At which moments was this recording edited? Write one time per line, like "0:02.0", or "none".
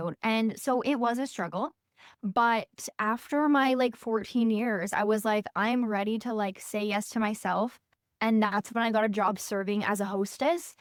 none